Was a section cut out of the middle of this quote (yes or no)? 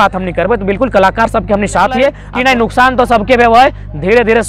yes